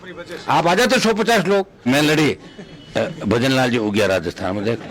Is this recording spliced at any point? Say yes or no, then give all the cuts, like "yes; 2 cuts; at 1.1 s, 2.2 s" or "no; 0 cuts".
yes; 1 cut; at 1.9 s